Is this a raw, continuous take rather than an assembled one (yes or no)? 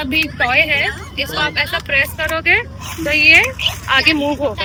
yes